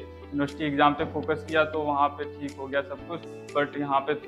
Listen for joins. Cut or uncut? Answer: uncut